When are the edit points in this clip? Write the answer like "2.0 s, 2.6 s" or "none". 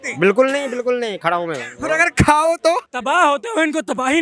2.9 s